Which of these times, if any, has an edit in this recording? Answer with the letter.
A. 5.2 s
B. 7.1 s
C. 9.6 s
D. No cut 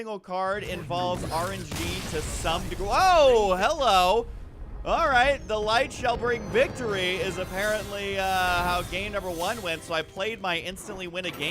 A